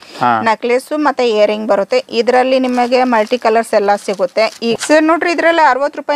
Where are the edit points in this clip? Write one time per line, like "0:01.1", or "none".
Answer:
0:04.8